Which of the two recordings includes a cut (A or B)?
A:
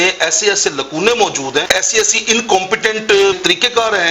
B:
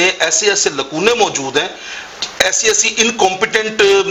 A